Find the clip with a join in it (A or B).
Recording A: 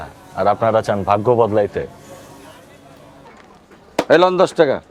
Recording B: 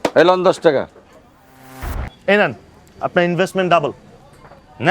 B